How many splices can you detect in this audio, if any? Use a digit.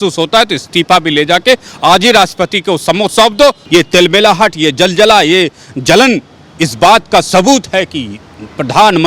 1